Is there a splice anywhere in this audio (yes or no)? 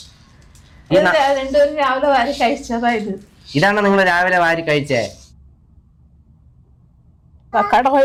no